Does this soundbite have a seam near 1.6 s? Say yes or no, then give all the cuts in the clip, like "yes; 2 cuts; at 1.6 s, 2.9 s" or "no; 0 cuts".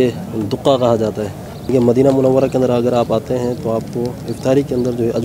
yes; 1 cut; at 1.6 s